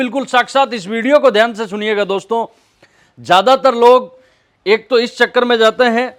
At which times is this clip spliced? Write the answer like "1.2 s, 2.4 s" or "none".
none